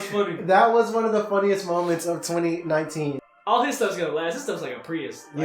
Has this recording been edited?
yes; 1 cut; at 3.2 s

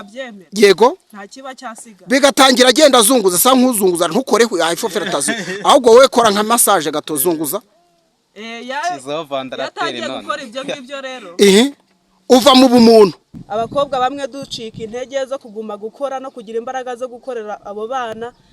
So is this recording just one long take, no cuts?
no; 1 cut; at 13.4 s

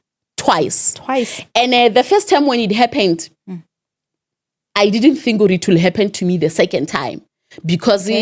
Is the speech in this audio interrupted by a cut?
no; 0 cuts

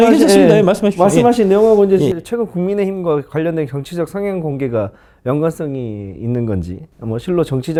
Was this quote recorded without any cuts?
yes; 0 cuts

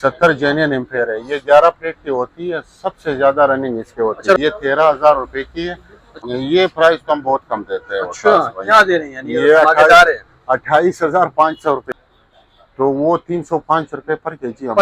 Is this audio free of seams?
no; 3 cuts; at 4.4 s, 6.1 s, 11.9 s

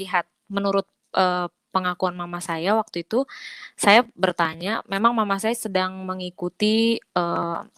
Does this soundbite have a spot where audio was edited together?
no; 0 cuts

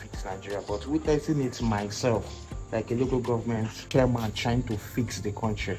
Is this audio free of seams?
yes; 0 cuts

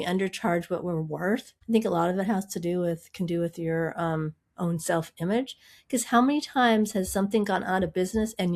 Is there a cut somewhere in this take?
no; 0 cuts

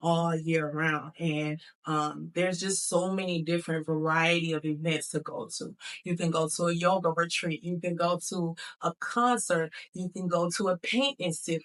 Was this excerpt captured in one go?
yes; 0 cuts

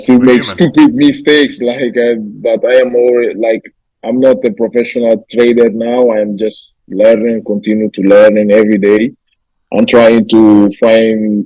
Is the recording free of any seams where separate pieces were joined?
yes; 0 cuts

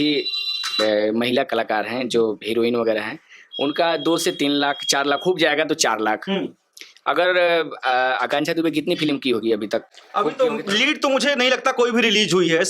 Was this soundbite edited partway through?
no; 0 cuts

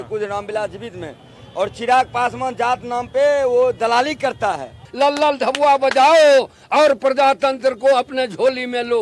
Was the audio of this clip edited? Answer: yes; 1 cut; at 4.9 s

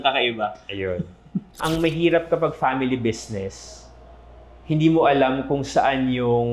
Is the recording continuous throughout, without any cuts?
no; 1 cut; at 1.6 s

